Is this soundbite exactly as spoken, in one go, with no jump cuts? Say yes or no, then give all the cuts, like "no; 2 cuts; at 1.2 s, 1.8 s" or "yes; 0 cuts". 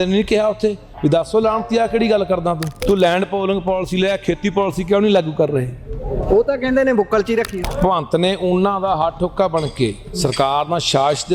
no; 2 cuts; at 2.7 s, 7.6 s